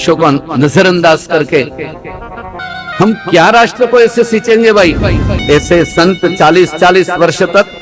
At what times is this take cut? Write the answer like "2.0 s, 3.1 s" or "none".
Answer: 2.6 s, 5.4 s